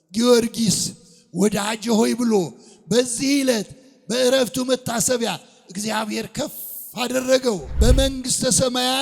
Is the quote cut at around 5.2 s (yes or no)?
no